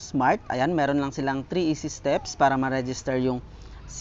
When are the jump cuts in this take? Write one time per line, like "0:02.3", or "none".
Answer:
none